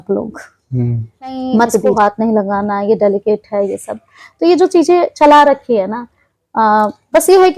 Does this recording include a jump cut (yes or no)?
yes